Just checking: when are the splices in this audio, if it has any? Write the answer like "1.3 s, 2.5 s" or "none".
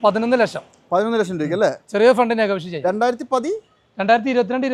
none